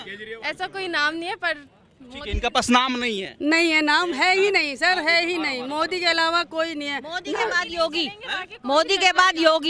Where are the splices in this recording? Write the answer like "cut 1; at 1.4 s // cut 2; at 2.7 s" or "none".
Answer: none